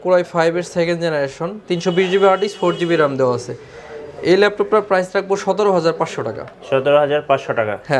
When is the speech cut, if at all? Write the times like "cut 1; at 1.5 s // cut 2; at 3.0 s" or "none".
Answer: none